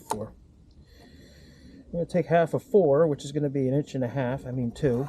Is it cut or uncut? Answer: uncut